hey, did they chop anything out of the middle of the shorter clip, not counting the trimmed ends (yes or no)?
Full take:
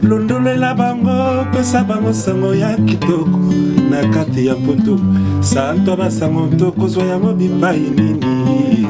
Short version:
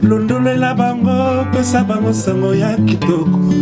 no